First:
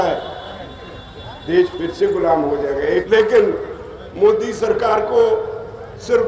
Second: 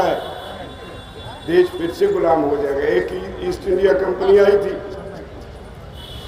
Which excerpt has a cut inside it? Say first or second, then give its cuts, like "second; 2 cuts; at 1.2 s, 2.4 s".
first; 1 cut; at 3.1 s